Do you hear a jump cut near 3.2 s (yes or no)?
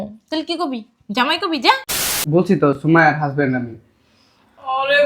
no